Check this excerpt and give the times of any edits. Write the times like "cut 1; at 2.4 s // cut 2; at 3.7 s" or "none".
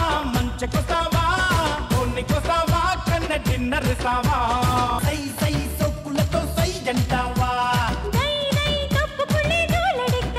none